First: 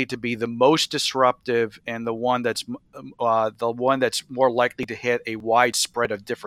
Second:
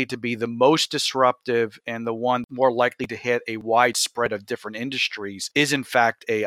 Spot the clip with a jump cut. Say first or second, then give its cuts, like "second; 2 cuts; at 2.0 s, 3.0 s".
second; 2 cuts; at 2.4 s, 5.4 s